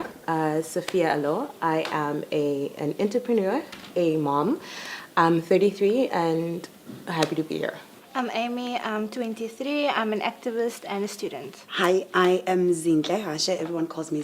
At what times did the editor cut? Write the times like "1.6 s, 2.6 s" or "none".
1.5 s